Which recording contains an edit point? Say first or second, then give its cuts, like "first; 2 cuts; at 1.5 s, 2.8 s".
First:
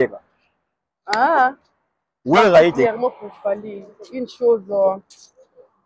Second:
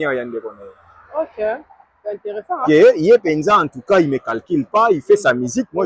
first; 1 cut; at 2.8 s